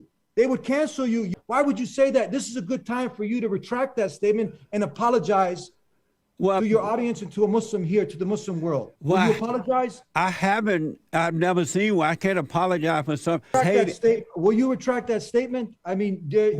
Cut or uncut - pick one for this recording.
cut